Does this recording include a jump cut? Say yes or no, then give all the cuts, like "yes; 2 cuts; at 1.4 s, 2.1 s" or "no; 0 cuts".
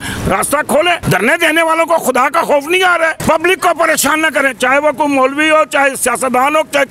yes; 2 cuts; at 1.0 s, 3.2 s